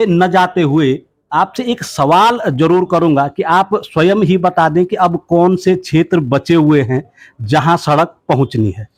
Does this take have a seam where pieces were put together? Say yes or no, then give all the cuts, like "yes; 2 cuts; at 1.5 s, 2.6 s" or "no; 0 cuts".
no; 0 cuts